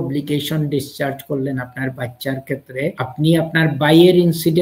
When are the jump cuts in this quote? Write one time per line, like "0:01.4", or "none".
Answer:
0:03.0